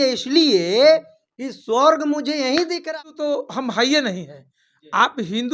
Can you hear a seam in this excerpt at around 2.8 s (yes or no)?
yes